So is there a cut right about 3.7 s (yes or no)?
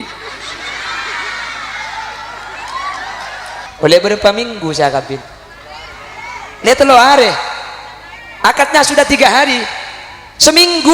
yes